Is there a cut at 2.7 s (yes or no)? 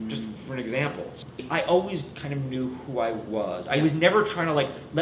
no